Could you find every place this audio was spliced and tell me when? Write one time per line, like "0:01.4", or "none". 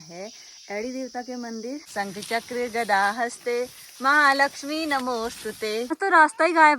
0:01.8
0:06.0